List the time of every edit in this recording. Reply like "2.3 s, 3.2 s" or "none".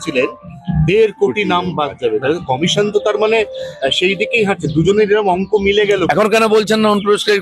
6.1 s